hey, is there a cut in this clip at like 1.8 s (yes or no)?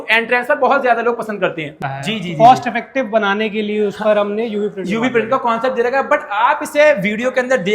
yes